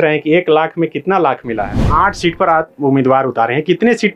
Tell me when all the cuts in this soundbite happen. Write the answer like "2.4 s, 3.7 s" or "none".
1.8 s

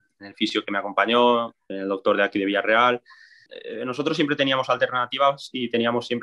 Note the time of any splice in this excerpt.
3.6 s

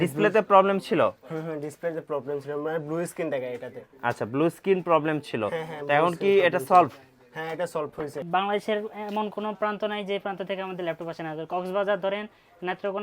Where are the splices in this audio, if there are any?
8.2 s

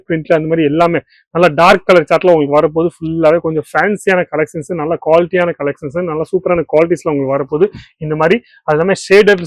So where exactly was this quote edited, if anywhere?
none

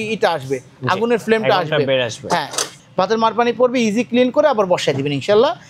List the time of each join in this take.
2.6 s

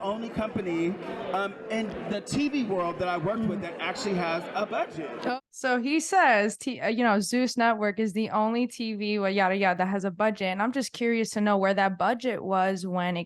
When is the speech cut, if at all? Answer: 5.4 s

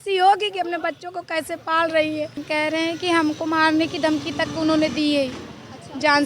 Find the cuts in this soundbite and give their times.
2.4 s

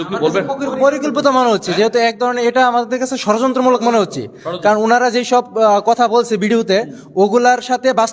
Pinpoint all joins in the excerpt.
none

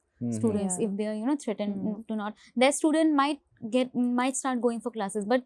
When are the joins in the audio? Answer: none

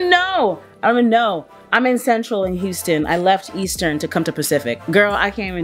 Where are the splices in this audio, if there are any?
none

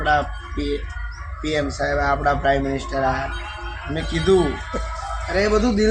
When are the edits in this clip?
none

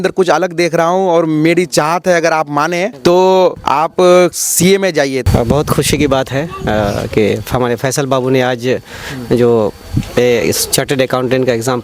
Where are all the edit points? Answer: 2.9 s, 3.6 s, 5.2 s

